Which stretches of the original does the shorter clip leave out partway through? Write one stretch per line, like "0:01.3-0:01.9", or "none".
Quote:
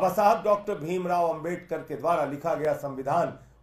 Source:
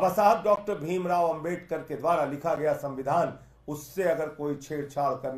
none